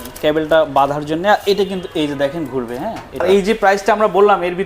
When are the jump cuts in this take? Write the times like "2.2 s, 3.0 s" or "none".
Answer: 3.2 s